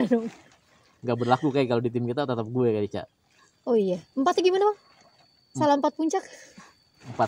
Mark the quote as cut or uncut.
uncut